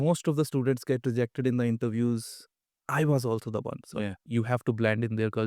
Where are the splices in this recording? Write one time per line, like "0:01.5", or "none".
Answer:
0:04.2